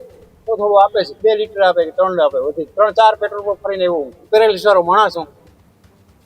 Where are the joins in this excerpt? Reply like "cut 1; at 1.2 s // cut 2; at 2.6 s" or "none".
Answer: cut 1; at 1.1 s // cut 2; at 2.6 s // cut 3; at 4.1 s